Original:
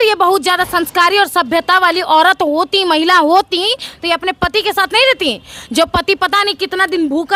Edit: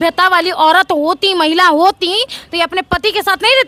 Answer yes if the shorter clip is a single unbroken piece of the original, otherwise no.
yes